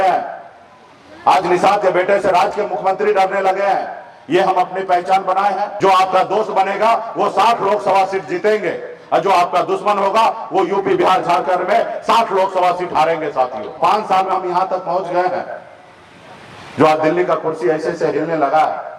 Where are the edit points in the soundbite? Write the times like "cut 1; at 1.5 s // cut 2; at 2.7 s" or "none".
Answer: cut 1; at 5.7 s // cut 2; at 13.8 s